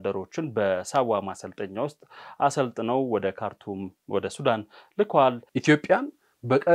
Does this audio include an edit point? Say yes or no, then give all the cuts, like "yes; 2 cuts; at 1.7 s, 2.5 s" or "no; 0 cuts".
yes; 1 cut; at 5.5 s